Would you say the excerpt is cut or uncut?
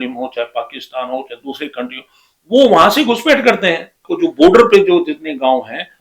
cut